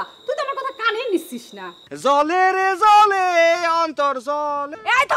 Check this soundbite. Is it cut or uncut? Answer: cut